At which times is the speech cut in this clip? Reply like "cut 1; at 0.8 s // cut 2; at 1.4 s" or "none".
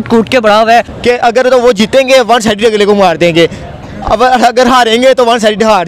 cut 1; at 0.9 s